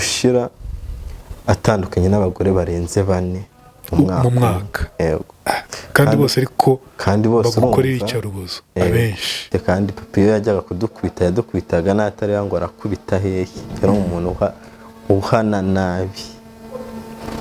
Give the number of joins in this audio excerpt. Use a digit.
1